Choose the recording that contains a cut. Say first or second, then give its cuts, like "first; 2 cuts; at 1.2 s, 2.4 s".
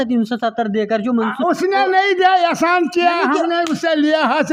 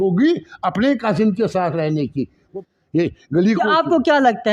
second; 1 cut; at 2.5 s